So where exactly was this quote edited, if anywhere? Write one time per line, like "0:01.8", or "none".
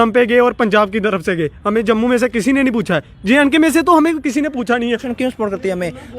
0:05.1